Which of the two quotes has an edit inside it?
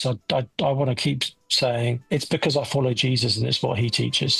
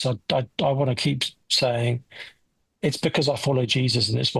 first; 1 cut; at 2.0 s

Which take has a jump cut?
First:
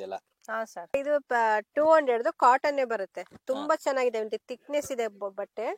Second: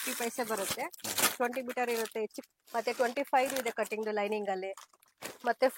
second; 1 cut; at 2.4 s

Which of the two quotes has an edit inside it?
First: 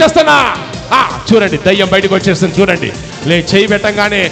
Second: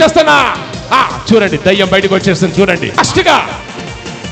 second; 1 cut; at 3.0 s

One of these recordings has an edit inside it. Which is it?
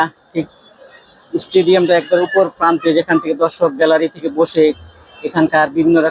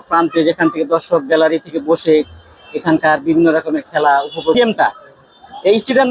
second; 1 cut; at 4.6 s

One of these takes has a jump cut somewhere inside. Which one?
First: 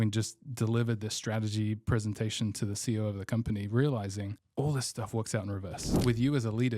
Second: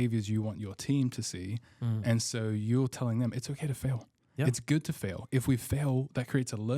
first; 2 cuts; at 4.4 s, 5.9 s

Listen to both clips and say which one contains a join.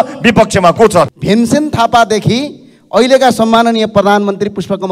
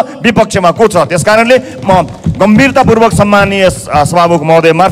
first; 1 cut; at 1.1 s

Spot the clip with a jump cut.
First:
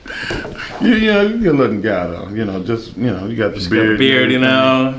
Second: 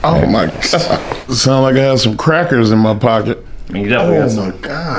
second; 2 cuts; at 1.3 s, 3.6 s

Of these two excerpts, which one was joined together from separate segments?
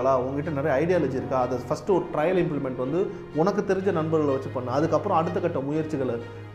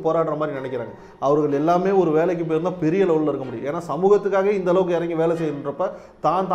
second; 1 cut; at 1.0 s

